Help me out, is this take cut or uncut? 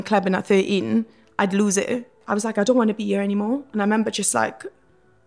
cut